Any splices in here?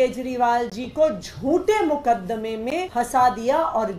yes; 1 cut; at 2.9 s

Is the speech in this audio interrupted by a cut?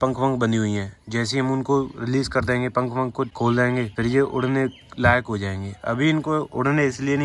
no; 0 cuts

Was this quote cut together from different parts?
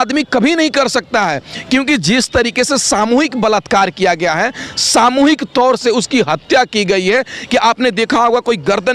no; 0 cuts

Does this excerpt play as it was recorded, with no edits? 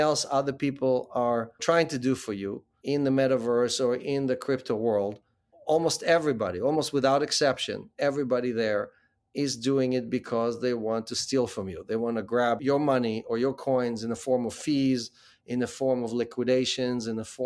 no; 2 cuts; at 1.6 s, 2.7 s

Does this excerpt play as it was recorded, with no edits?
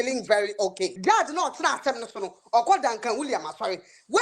no; 1 cut; at 1.0 s

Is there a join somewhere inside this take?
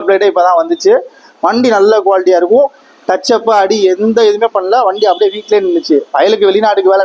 no; 0 cuts

